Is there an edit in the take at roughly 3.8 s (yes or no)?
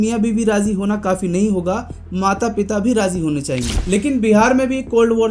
yes